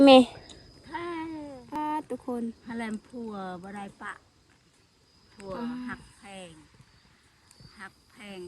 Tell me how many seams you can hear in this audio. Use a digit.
1